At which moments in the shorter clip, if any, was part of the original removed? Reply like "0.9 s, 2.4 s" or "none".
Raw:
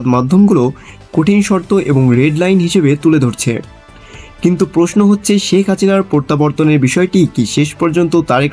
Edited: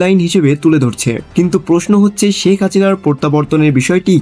1.2 s

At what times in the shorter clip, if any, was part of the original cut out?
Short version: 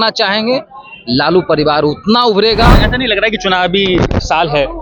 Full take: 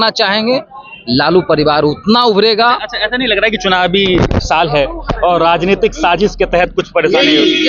2.8 s

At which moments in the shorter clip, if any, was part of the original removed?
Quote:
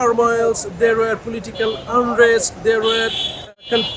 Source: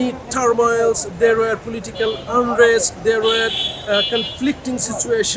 none

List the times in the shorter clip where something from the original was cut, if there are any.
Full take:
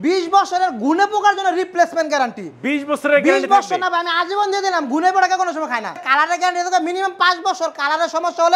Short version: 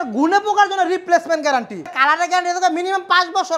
1.8 s

